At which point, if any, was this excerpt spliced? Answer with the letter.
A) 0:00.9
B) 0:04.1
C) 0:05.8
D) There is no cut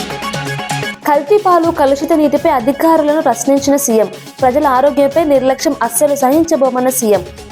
A